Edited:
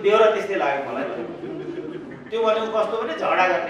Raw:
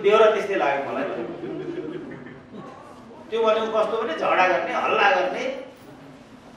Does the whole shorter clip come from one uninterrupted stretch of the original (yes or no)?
no